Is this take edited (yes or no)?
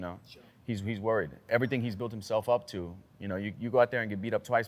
yes